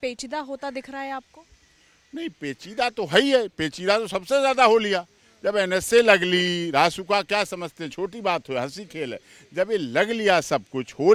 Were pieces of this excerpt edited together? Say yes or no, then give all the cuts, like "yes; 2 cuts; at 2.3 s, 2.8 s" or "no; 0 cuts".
no; 0 cuts